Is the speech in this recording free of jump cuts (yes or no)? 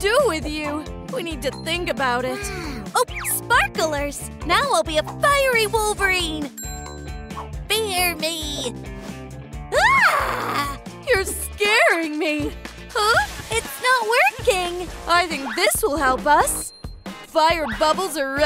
no